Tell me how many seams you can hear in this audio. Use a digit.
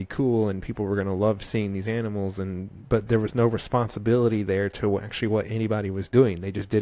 0